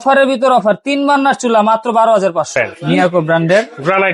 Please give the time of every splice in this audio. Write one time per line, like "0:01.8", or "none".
0:02.5